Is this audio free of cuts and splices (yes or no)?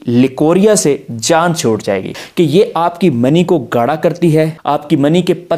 no